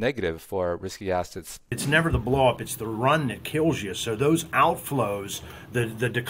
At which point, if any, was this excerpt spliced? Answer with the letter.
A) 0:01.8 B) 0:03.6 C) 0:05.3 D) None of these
A